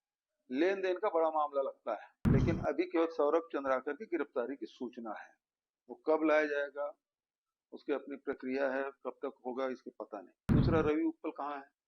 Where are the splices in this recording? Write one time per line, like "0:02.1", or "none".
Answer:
0:02.1
0:10.5